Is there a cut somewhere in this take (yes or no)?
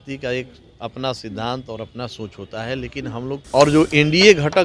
yes